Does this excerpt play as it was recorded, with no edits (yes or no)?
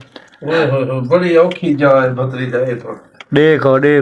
yes